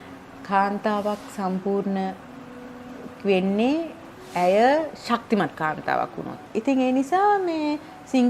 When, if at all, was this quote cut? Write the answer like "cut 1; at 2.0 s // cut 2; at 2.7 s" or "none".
cut 1; at 6.5 s